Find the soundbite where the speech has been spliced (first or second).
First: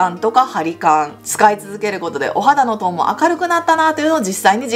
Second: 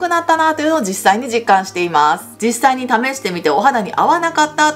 second